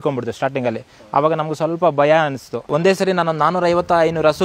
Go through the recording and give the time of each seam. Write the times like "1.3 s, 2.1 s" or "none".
2.7 s